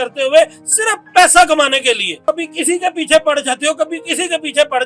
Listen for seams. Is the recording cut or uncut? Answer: cut